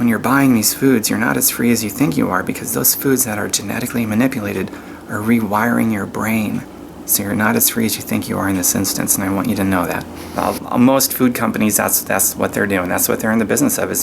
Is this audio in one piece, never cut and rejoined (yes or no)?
no